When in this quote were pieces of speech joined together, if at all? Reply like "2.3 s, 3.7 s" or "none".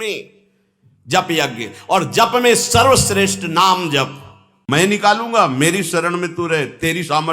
4.6 s